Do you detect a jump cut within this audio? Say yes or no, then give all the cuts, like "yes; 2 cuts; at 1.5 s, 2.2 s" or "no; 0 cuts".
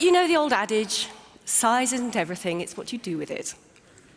no; 0 cuts